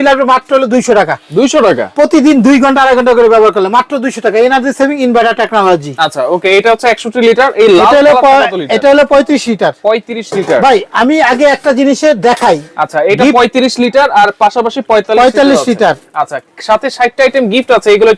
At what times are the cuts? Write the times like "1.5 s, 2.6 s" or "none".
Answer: none